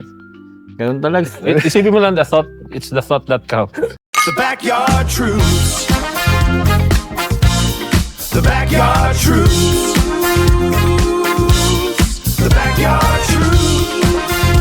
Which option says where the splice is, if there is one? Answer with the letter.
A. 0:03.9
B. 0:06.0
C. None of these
A